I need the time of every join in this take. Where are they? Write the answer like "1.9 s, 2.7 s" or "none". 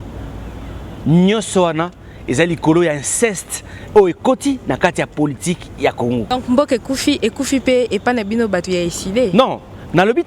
6.3 s